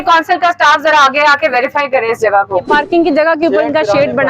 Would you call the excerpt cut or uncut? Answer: cut